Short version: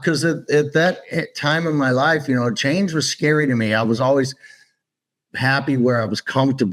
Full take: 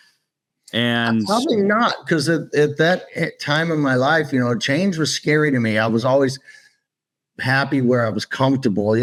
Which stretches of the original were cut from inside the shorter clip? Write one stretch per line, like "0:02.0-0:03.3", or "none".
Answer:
none

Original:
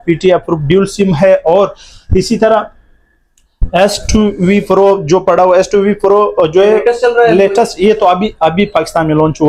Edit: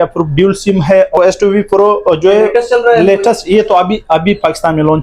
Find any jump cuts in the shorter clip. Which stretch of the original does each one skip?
0:01.5-0:05.5

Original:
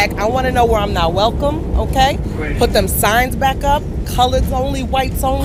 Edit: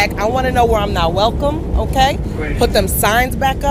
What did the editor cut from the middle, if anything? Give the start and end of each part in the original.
none

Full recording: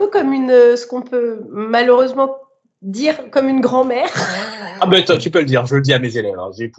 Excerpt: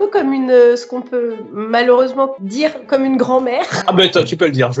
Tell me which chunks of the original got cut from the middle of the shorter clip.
0:02.4-0:02.9
0:04.2-0:04.7

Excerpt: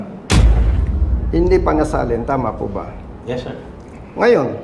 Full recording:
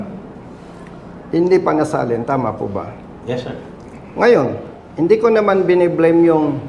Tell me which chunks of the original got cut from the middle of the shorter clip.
none

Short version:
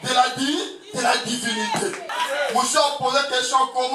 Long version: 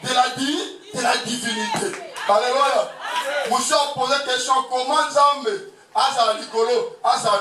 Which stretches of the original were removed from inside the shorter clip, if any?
0:02.1-0:03.0

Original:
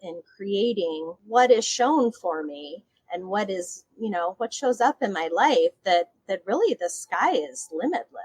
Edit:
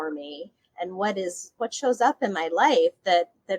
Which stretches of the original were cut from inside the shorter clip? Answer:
0:03.9-0:04.4

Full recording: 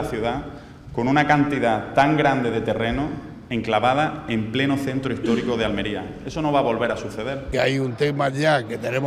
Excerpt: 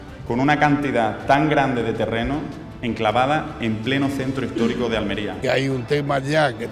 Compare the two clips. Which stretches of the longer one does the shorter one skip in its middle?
0:06.0-0:07.5

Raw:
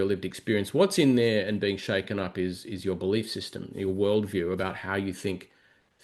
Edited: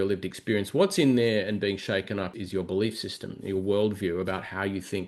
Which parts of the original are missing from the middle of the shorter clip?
0:02.3-0:02.6

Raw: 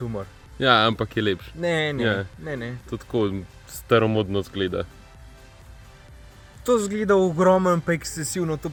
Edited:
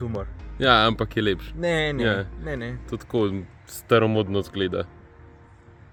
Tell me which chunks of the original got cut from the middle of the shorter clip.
none

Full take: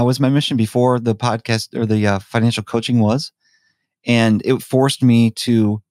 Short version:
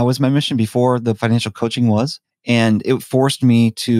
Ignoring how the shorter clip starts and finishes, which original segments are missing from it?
0:01.2-0:02.3
0:03.4-0:03.9

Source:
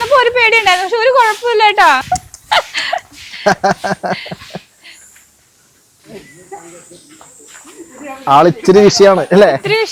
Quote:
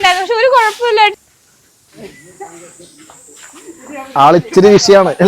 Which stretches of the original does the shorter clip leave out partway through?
0:01.7-0:05.2

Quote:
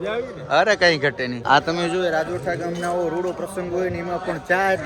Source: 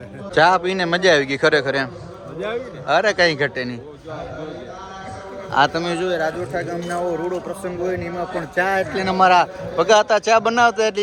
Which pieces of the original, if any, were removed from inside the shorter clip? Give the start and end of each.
0:03.8-0:05.5

